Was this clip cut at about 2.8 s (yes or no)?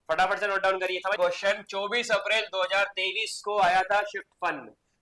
no